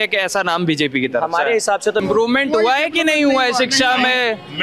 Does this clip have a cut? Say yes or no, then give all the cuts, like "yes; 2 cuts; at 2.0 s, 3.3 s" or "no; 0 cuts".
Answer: yes; 1 cut; at 2.0 s